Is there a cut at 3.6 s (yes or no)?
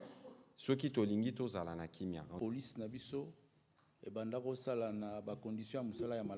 no